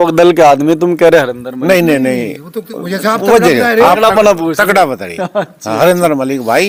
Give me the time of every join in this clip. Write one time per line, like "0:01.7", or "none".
none